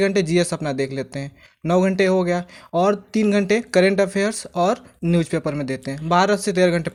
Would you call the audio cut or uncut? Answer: uncut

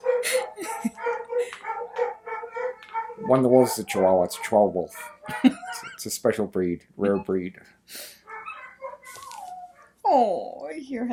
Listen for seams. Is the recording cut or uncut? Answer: uncut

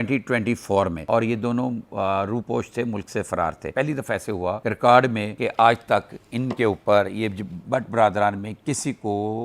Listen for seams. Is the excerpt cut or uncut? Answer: cut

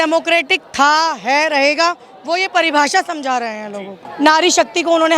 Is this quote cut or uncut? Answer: cut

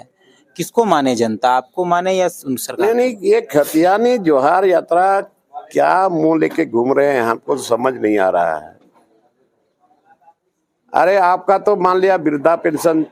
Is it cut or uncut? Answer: uncut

